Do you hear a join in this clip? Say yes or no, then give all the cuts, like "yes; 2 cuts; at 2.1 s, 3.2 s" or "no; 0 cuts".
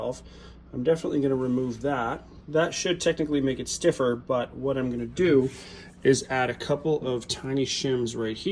no; 0 cuts